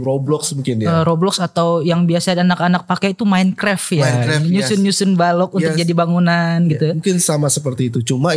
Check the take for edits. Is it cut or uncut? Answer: uncut